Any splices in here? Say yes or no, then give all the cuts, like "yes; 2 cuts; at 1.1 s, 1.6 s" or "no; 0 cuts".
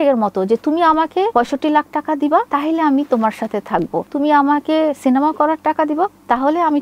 yes; 1 cut; at 1.3 s